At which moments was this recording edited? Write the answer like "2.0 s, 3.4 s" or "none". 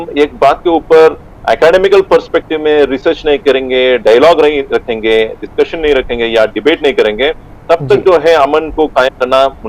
none

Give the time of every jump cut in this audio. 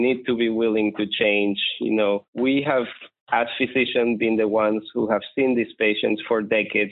2.3 s

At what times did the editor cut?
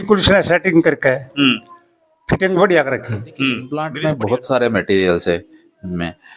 3.9 s

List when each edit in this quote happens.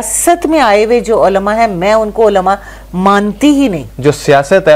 3.9 s

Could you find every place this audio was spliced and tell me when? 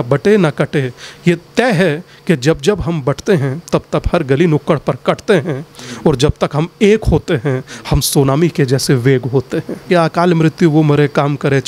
9.8 s

